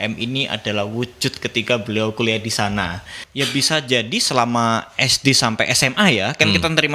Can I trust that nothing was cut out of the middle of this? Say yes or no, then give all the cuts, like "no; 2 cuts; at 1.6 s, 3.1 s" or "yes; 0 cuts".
no; 1 cut; at 3.2 s